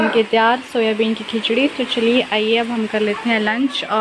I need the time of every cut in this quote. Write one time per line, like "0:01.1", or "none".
none